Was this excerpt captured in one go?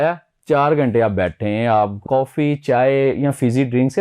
no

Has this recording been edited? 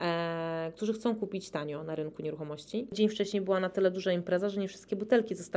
yes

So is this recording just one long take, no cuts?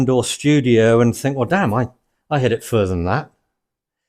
yes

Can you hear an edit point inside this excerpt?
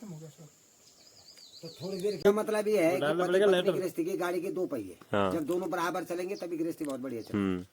yes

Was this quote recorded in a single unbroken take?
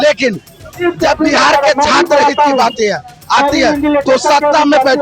yes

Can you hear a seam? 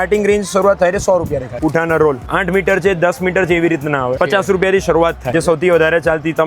yes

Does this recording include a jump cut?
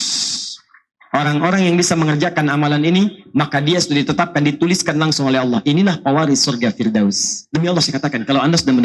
yes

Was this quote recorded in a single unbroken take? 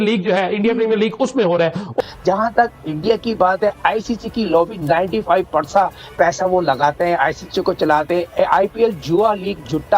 no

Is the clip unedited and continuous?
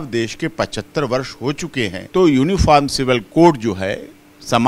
no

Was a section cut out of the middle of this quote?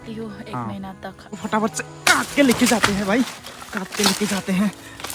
yes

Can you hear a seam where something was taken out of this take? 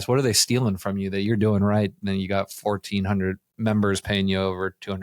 yes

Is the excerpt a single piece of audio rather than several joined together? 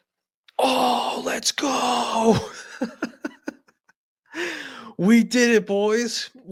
yes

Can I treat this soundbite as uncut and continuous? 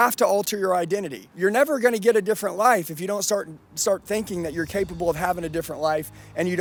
yes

